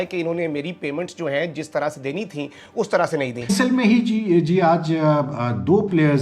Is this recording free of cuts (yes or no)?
no